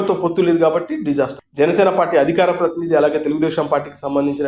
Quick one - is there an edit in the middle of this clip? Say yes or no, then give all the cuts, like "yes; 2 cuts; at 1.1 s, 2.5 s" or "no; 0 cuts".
yes; 1 cut; at 1.4 s